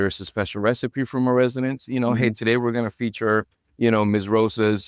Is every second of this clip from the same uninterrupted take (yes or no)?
yes